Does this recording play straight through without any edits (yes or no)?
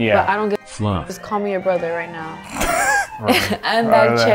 no